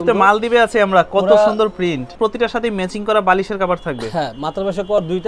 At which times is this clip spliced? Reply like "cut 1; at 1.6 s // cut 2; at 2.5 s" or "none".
cut 1; at 2.1 s